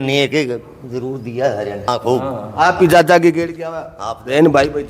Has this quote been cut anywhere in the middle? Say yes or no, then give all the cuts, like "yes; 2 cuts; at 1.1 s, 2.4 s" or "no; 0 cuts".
yes; 1 cut; at 1.9 s